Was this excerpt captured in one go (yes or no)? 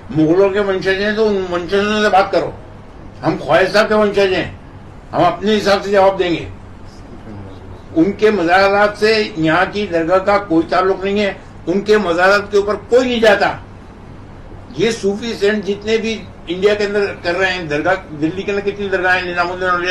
yes